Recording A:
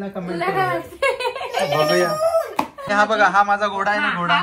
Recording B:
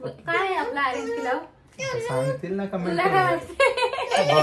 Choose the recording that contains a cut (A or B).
A